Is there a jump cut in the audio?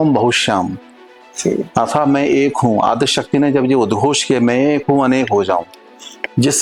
no; 0 cuts

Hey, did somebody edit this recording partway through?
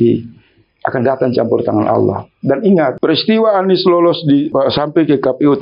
yes; 2 cuts; at 3.0 s, 4.5 s

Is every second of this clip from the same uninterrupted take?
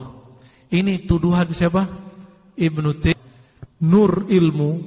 no; 1 cut; at 3.1 s

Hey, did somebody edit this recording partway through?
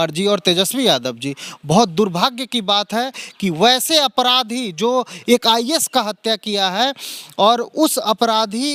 no; 0 cuts

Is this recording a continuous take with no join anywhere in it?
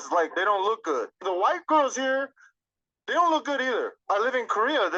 yes; 0 cuts

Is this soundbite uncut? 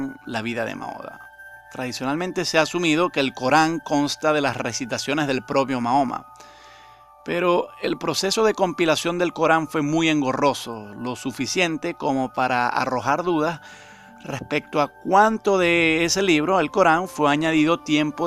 yes; 0 cuts

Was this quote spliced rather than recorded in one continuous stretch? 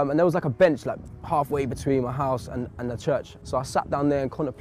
yes; 1 cut; at 3.4 s

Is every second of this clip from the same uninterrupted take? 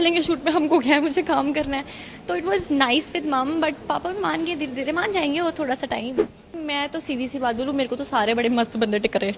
no; 1 cut; at 6.6 s

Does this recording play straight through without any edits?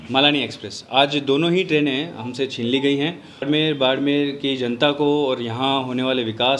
no; 1 cut; at 3.4 s

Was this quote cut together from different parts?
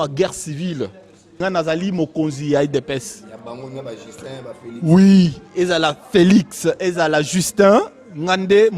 yes; 1 cut; at 1.3 s

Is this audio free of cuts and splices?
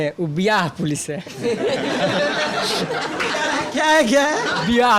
yes; 0 cuts

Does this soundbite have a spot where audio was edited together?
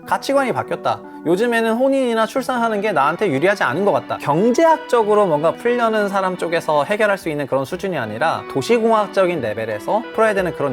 yes; 2 cuts; at 4.2 s, 5.6 s

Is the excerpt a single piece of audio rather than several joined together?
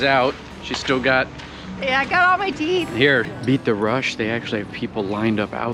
no; 1 cut; at 3.3 s

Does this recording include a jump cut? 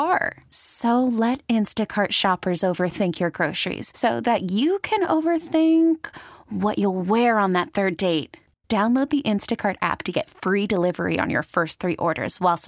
no; 0 cuts

